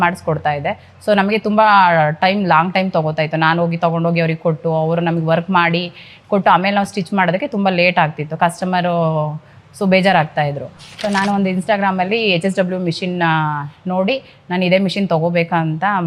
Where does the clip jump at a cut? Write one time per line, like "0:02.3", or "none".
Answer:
none